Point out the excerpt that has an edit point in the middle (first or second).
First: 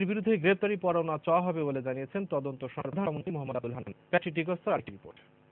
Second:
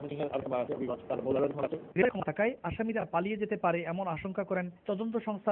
first